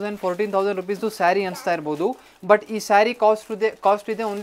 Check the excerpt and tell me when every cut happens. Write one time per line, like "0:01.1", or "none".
none

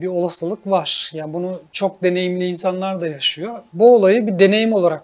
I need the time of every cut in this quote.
0:01.6
0:03.6

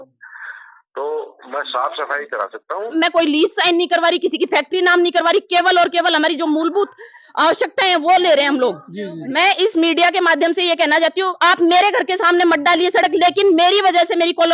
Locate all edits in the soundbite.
0:02.9
0:09.2

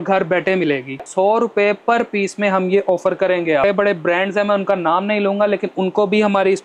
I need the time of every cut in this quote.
0:01.1
0:03.6

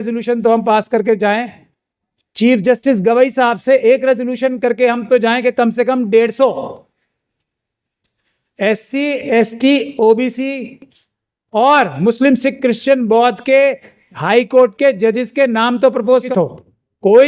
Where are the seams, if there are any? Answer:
0:16.3

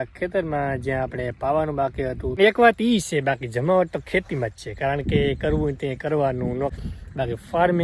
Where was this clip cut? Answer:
0:02.3
0:06.8

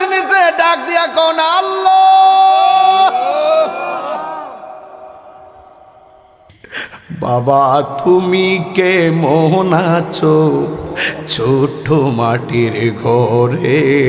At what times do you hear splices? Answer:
0:06.5

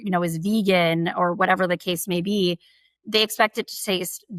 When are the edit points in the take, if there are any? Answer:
none

